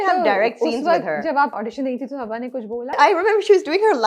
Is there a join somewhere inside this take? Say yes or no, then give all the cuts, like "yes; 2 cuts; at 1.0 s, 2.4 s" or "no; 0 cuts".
yes; 2 cuts; at 1.5 s, 3.0 s